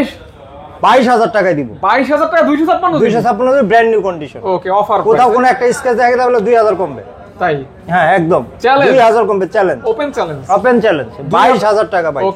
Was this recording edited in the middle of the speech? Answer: no; 0 cuts

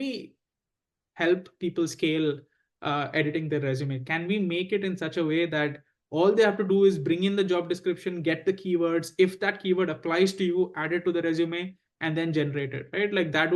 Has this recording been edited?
no; 0 cuts

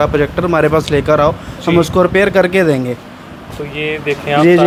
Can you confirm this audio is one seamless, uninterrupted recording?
yes; 0 cuts

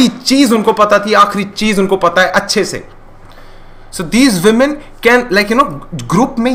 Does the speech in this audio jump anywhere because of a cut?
no; 0 cuts

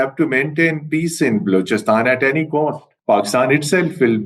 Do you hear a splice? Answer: yes; 1 cut; at 2.9 s

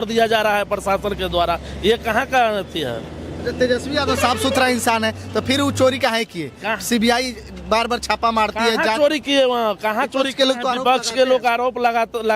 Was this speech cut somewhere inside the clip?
no; 0 cuts

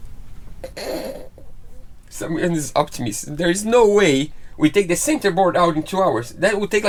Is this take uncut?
yes; 0 cuts

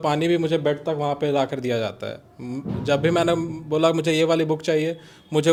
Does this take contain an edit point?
no; 0 cuts

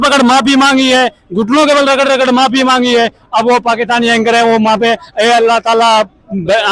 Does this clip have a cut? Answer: no; 0 cuts

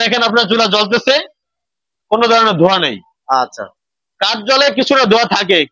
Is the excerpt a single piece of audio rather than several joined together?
yes; 0 cuts

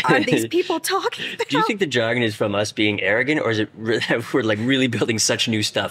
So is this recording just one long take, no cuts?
yes; 0 cuts

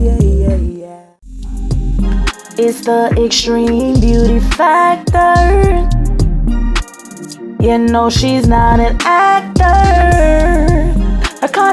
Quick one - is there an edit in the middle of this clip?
yes; 1 cut; at 1.0 s

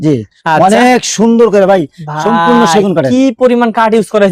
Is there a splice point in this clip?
no; 0 cuts

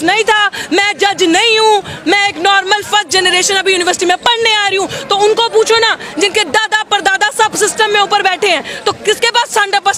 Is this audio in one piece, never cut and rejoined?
yes; 0 cuts

